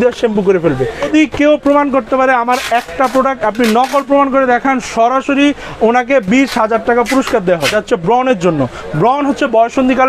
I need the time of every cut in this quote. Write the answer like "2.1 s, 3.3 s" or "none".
1.1 s, 7.7 s